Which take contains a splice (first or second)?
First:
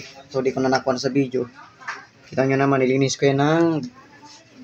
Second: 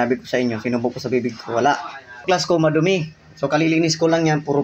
second